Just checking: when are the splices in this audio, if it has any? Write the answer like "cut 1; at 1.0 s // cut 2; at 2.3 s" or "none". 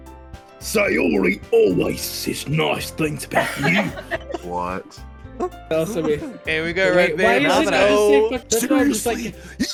none